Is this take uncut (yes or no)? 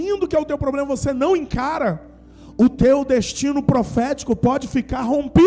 yes